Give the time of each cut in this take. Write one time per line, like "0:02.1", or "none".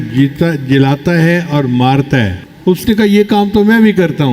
0:02.4